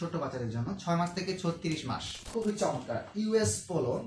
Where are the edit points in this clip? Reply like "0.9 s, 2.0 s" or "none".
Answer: 2.2 s